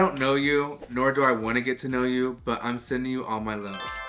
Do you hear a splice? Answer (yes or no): no